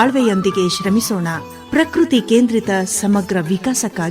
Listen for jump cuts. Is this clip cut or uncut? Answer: uncut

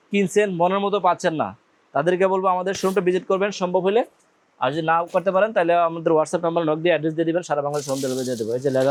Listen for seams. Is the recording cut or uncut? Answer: uncut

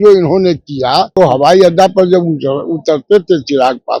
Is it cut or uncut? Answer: cut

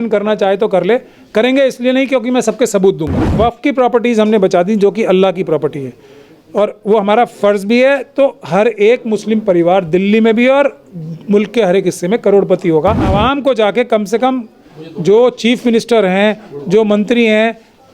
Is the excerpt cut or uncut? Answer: cut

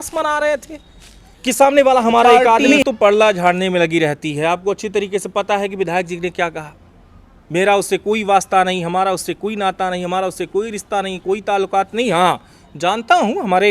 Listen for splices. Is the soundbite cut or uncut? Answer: cut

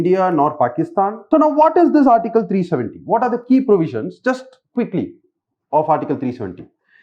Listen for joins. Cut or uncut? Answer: cut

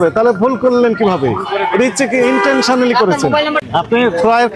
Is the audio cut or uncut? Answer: uncut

